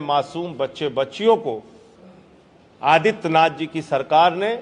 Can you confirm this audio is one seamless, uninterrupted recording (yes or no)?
yes